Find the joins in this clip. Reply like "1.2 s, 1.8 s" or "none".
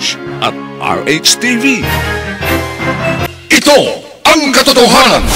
3.3 s